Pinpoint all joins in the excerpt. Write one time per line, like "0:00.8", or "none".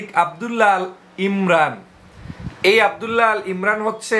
none